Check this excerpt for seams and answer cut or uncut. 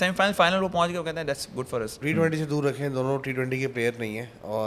cut